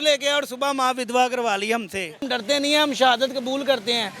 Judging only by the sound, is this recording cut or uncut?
cut